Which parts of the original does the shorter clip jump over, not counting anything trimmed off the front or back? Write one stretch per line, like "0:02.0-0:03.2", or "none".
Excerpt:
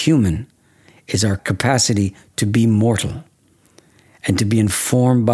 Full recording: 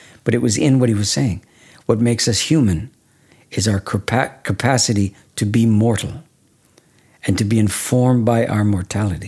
0:03.8-0:04.4

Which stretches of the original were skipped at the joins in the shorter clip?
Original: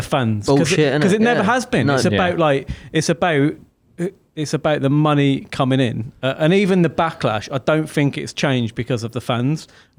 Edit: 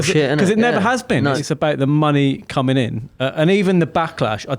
0:02.0-0:04.4

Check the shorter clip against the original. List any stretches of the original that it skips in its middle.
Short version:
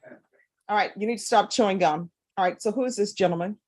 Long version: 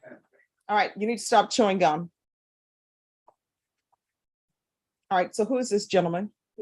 0:02.2-0:04.9

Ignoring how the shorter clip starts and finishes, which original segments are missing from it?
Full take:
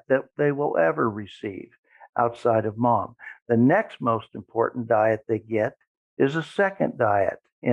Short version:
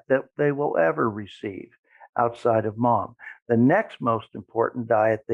none

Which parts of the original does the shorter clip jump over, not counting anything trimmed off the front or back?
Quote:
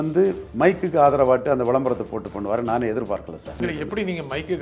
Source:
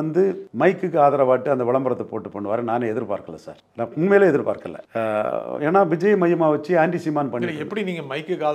0:03.6-0:07.4

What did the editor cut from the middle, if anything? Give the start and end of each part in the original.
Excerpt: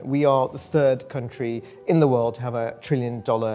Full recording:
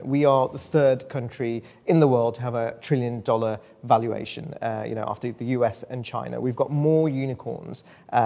none

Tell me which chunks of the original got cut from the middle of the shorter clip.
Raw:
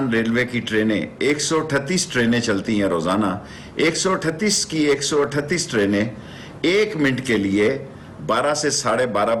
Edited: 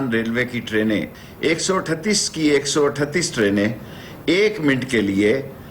0:01.1-0:03.5

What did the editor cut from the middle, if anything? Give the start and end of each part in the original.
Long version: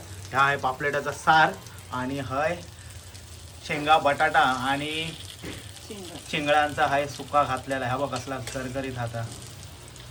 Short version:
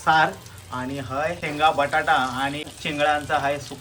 0:02.6-0:03.7
0:05.0-0:06.2

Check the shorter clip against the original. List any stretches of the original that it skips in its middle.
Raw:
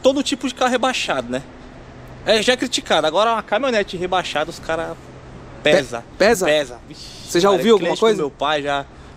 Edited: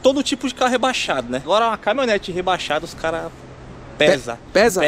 0:01.5-0:03.1

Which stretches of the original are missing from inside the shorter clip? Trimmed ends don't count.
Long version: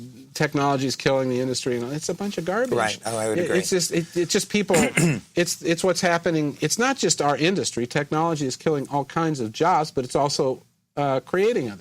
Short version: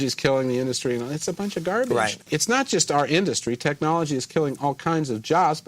0:03.0-0:06.5

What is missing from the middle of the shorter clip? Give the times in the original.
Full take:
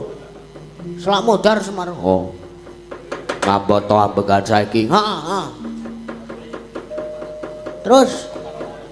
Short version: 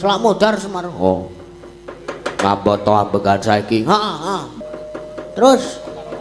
0:05.6-0:07.1

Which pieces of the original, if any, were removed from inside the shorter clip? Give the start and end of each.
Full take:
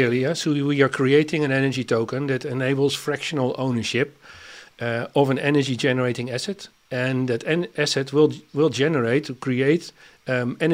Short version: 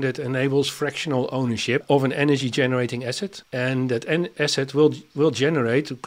0:04.1-0:05.1
0:06.6-0:06.8

